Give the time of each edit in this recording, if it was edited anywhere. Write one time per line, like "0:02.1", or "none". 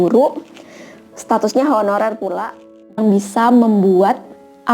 0:03.0